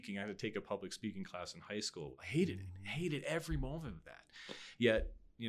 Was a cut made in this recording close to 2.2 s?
yes; 1 cut; at 2.2 s

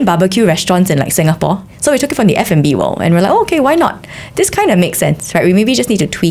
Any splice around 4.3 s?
no; 1 cut; at 1.7 s

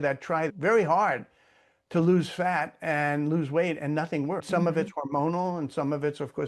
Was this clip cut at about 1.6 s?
no; 1 cut; at 4.4 s

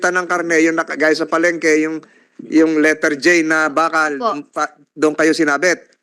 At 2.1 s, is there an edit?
no; 0 cuts

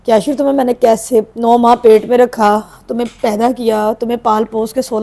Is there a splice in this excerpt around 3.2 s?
no; 1 cut; at 1.3 s

